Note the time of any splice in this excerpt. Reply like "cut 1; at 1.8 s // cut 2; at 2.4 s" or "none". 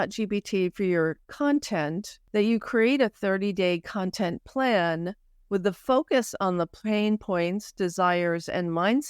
cut 1; at 1.2 s // cut 2; at 2.1 s